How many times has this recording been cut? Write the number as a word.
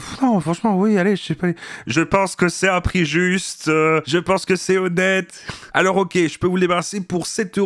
zero